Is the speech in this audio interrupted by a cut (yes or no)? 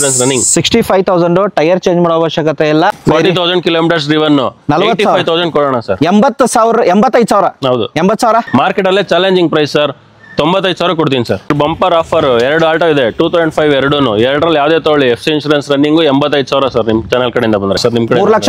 yes